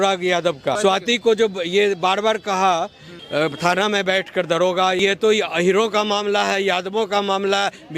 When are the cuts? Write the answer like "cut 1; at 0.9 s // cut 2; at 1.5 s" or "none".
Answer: cut 1; at 0.8 s // cut 2; at 3.1 s // cut 3; at 5.0 s